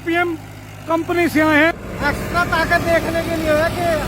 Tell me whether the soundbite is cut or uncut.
cut